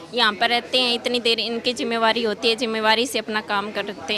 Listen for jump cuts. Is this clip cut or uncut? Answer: uncut